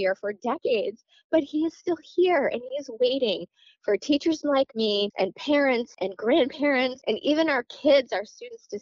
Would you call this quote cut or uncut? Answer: cut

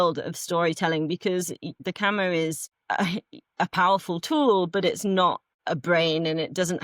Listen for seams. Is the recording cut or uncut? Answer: cut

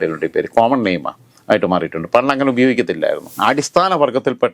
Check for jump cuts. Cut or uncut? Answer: cut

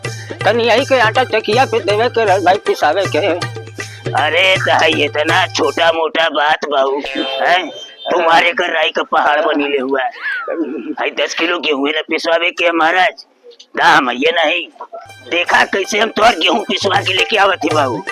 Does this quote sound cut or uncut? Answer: uncut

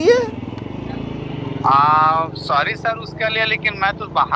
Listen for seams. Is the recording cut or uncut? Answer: uncut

